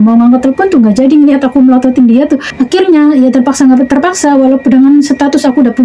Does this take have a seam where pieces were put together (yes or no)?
yes